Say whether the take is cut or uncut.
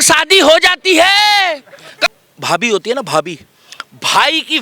cut